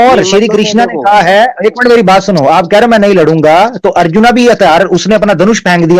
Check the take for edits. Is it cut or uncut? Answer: uncut